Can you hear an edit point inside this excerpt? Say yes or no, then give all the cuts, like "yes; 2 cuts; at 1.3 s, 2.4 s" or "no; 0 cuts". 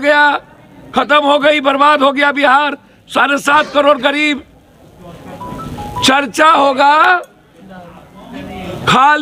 no; 0 cuts